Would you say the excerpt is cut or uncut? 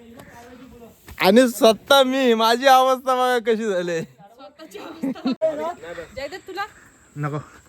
cut